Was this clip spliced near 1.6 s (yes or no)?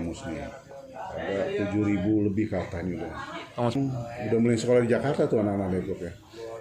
no